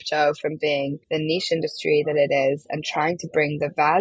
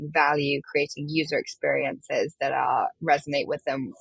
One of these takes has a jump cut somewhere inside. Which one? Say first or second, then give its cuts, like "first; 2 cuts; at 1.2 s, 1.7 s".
first; 1 cut; at 1.0 s